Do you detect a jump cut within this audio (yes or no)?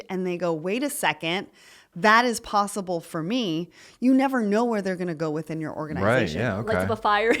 yes